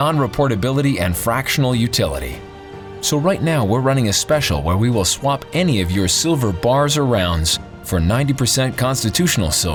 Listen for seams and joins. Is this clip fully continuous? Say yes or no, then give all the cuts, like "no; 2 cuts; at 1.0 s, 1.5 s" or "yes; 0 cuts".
yes; 0 cuts